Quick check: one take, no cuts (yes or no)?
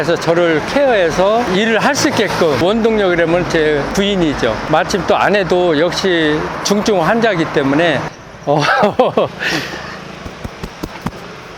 no